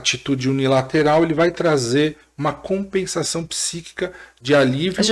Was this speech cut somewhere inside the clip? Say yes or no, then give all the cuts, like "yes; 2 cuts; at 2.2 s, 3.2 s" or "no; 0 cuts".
no; 0 cuts